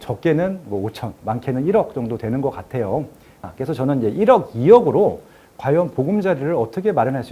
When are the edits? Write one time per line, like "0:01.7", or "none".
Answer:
0:03.5